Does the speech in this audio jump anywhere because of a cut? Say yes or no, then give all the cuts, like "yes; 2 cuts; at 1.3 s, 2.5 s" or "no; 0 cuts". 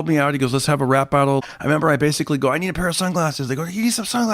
yes; 1 cut; at 1.4 s